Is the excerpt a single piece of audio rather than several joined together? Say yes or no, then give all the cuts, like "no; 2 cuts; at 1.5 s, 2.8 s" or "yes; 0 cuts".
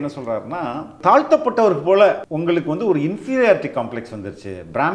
no; 2 cuts; at 1.0 s, 2.3 s